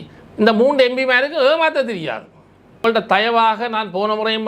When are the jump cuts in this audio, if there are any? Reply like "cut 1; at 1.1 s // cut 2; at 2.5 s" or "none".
cut 1; at 2.8 s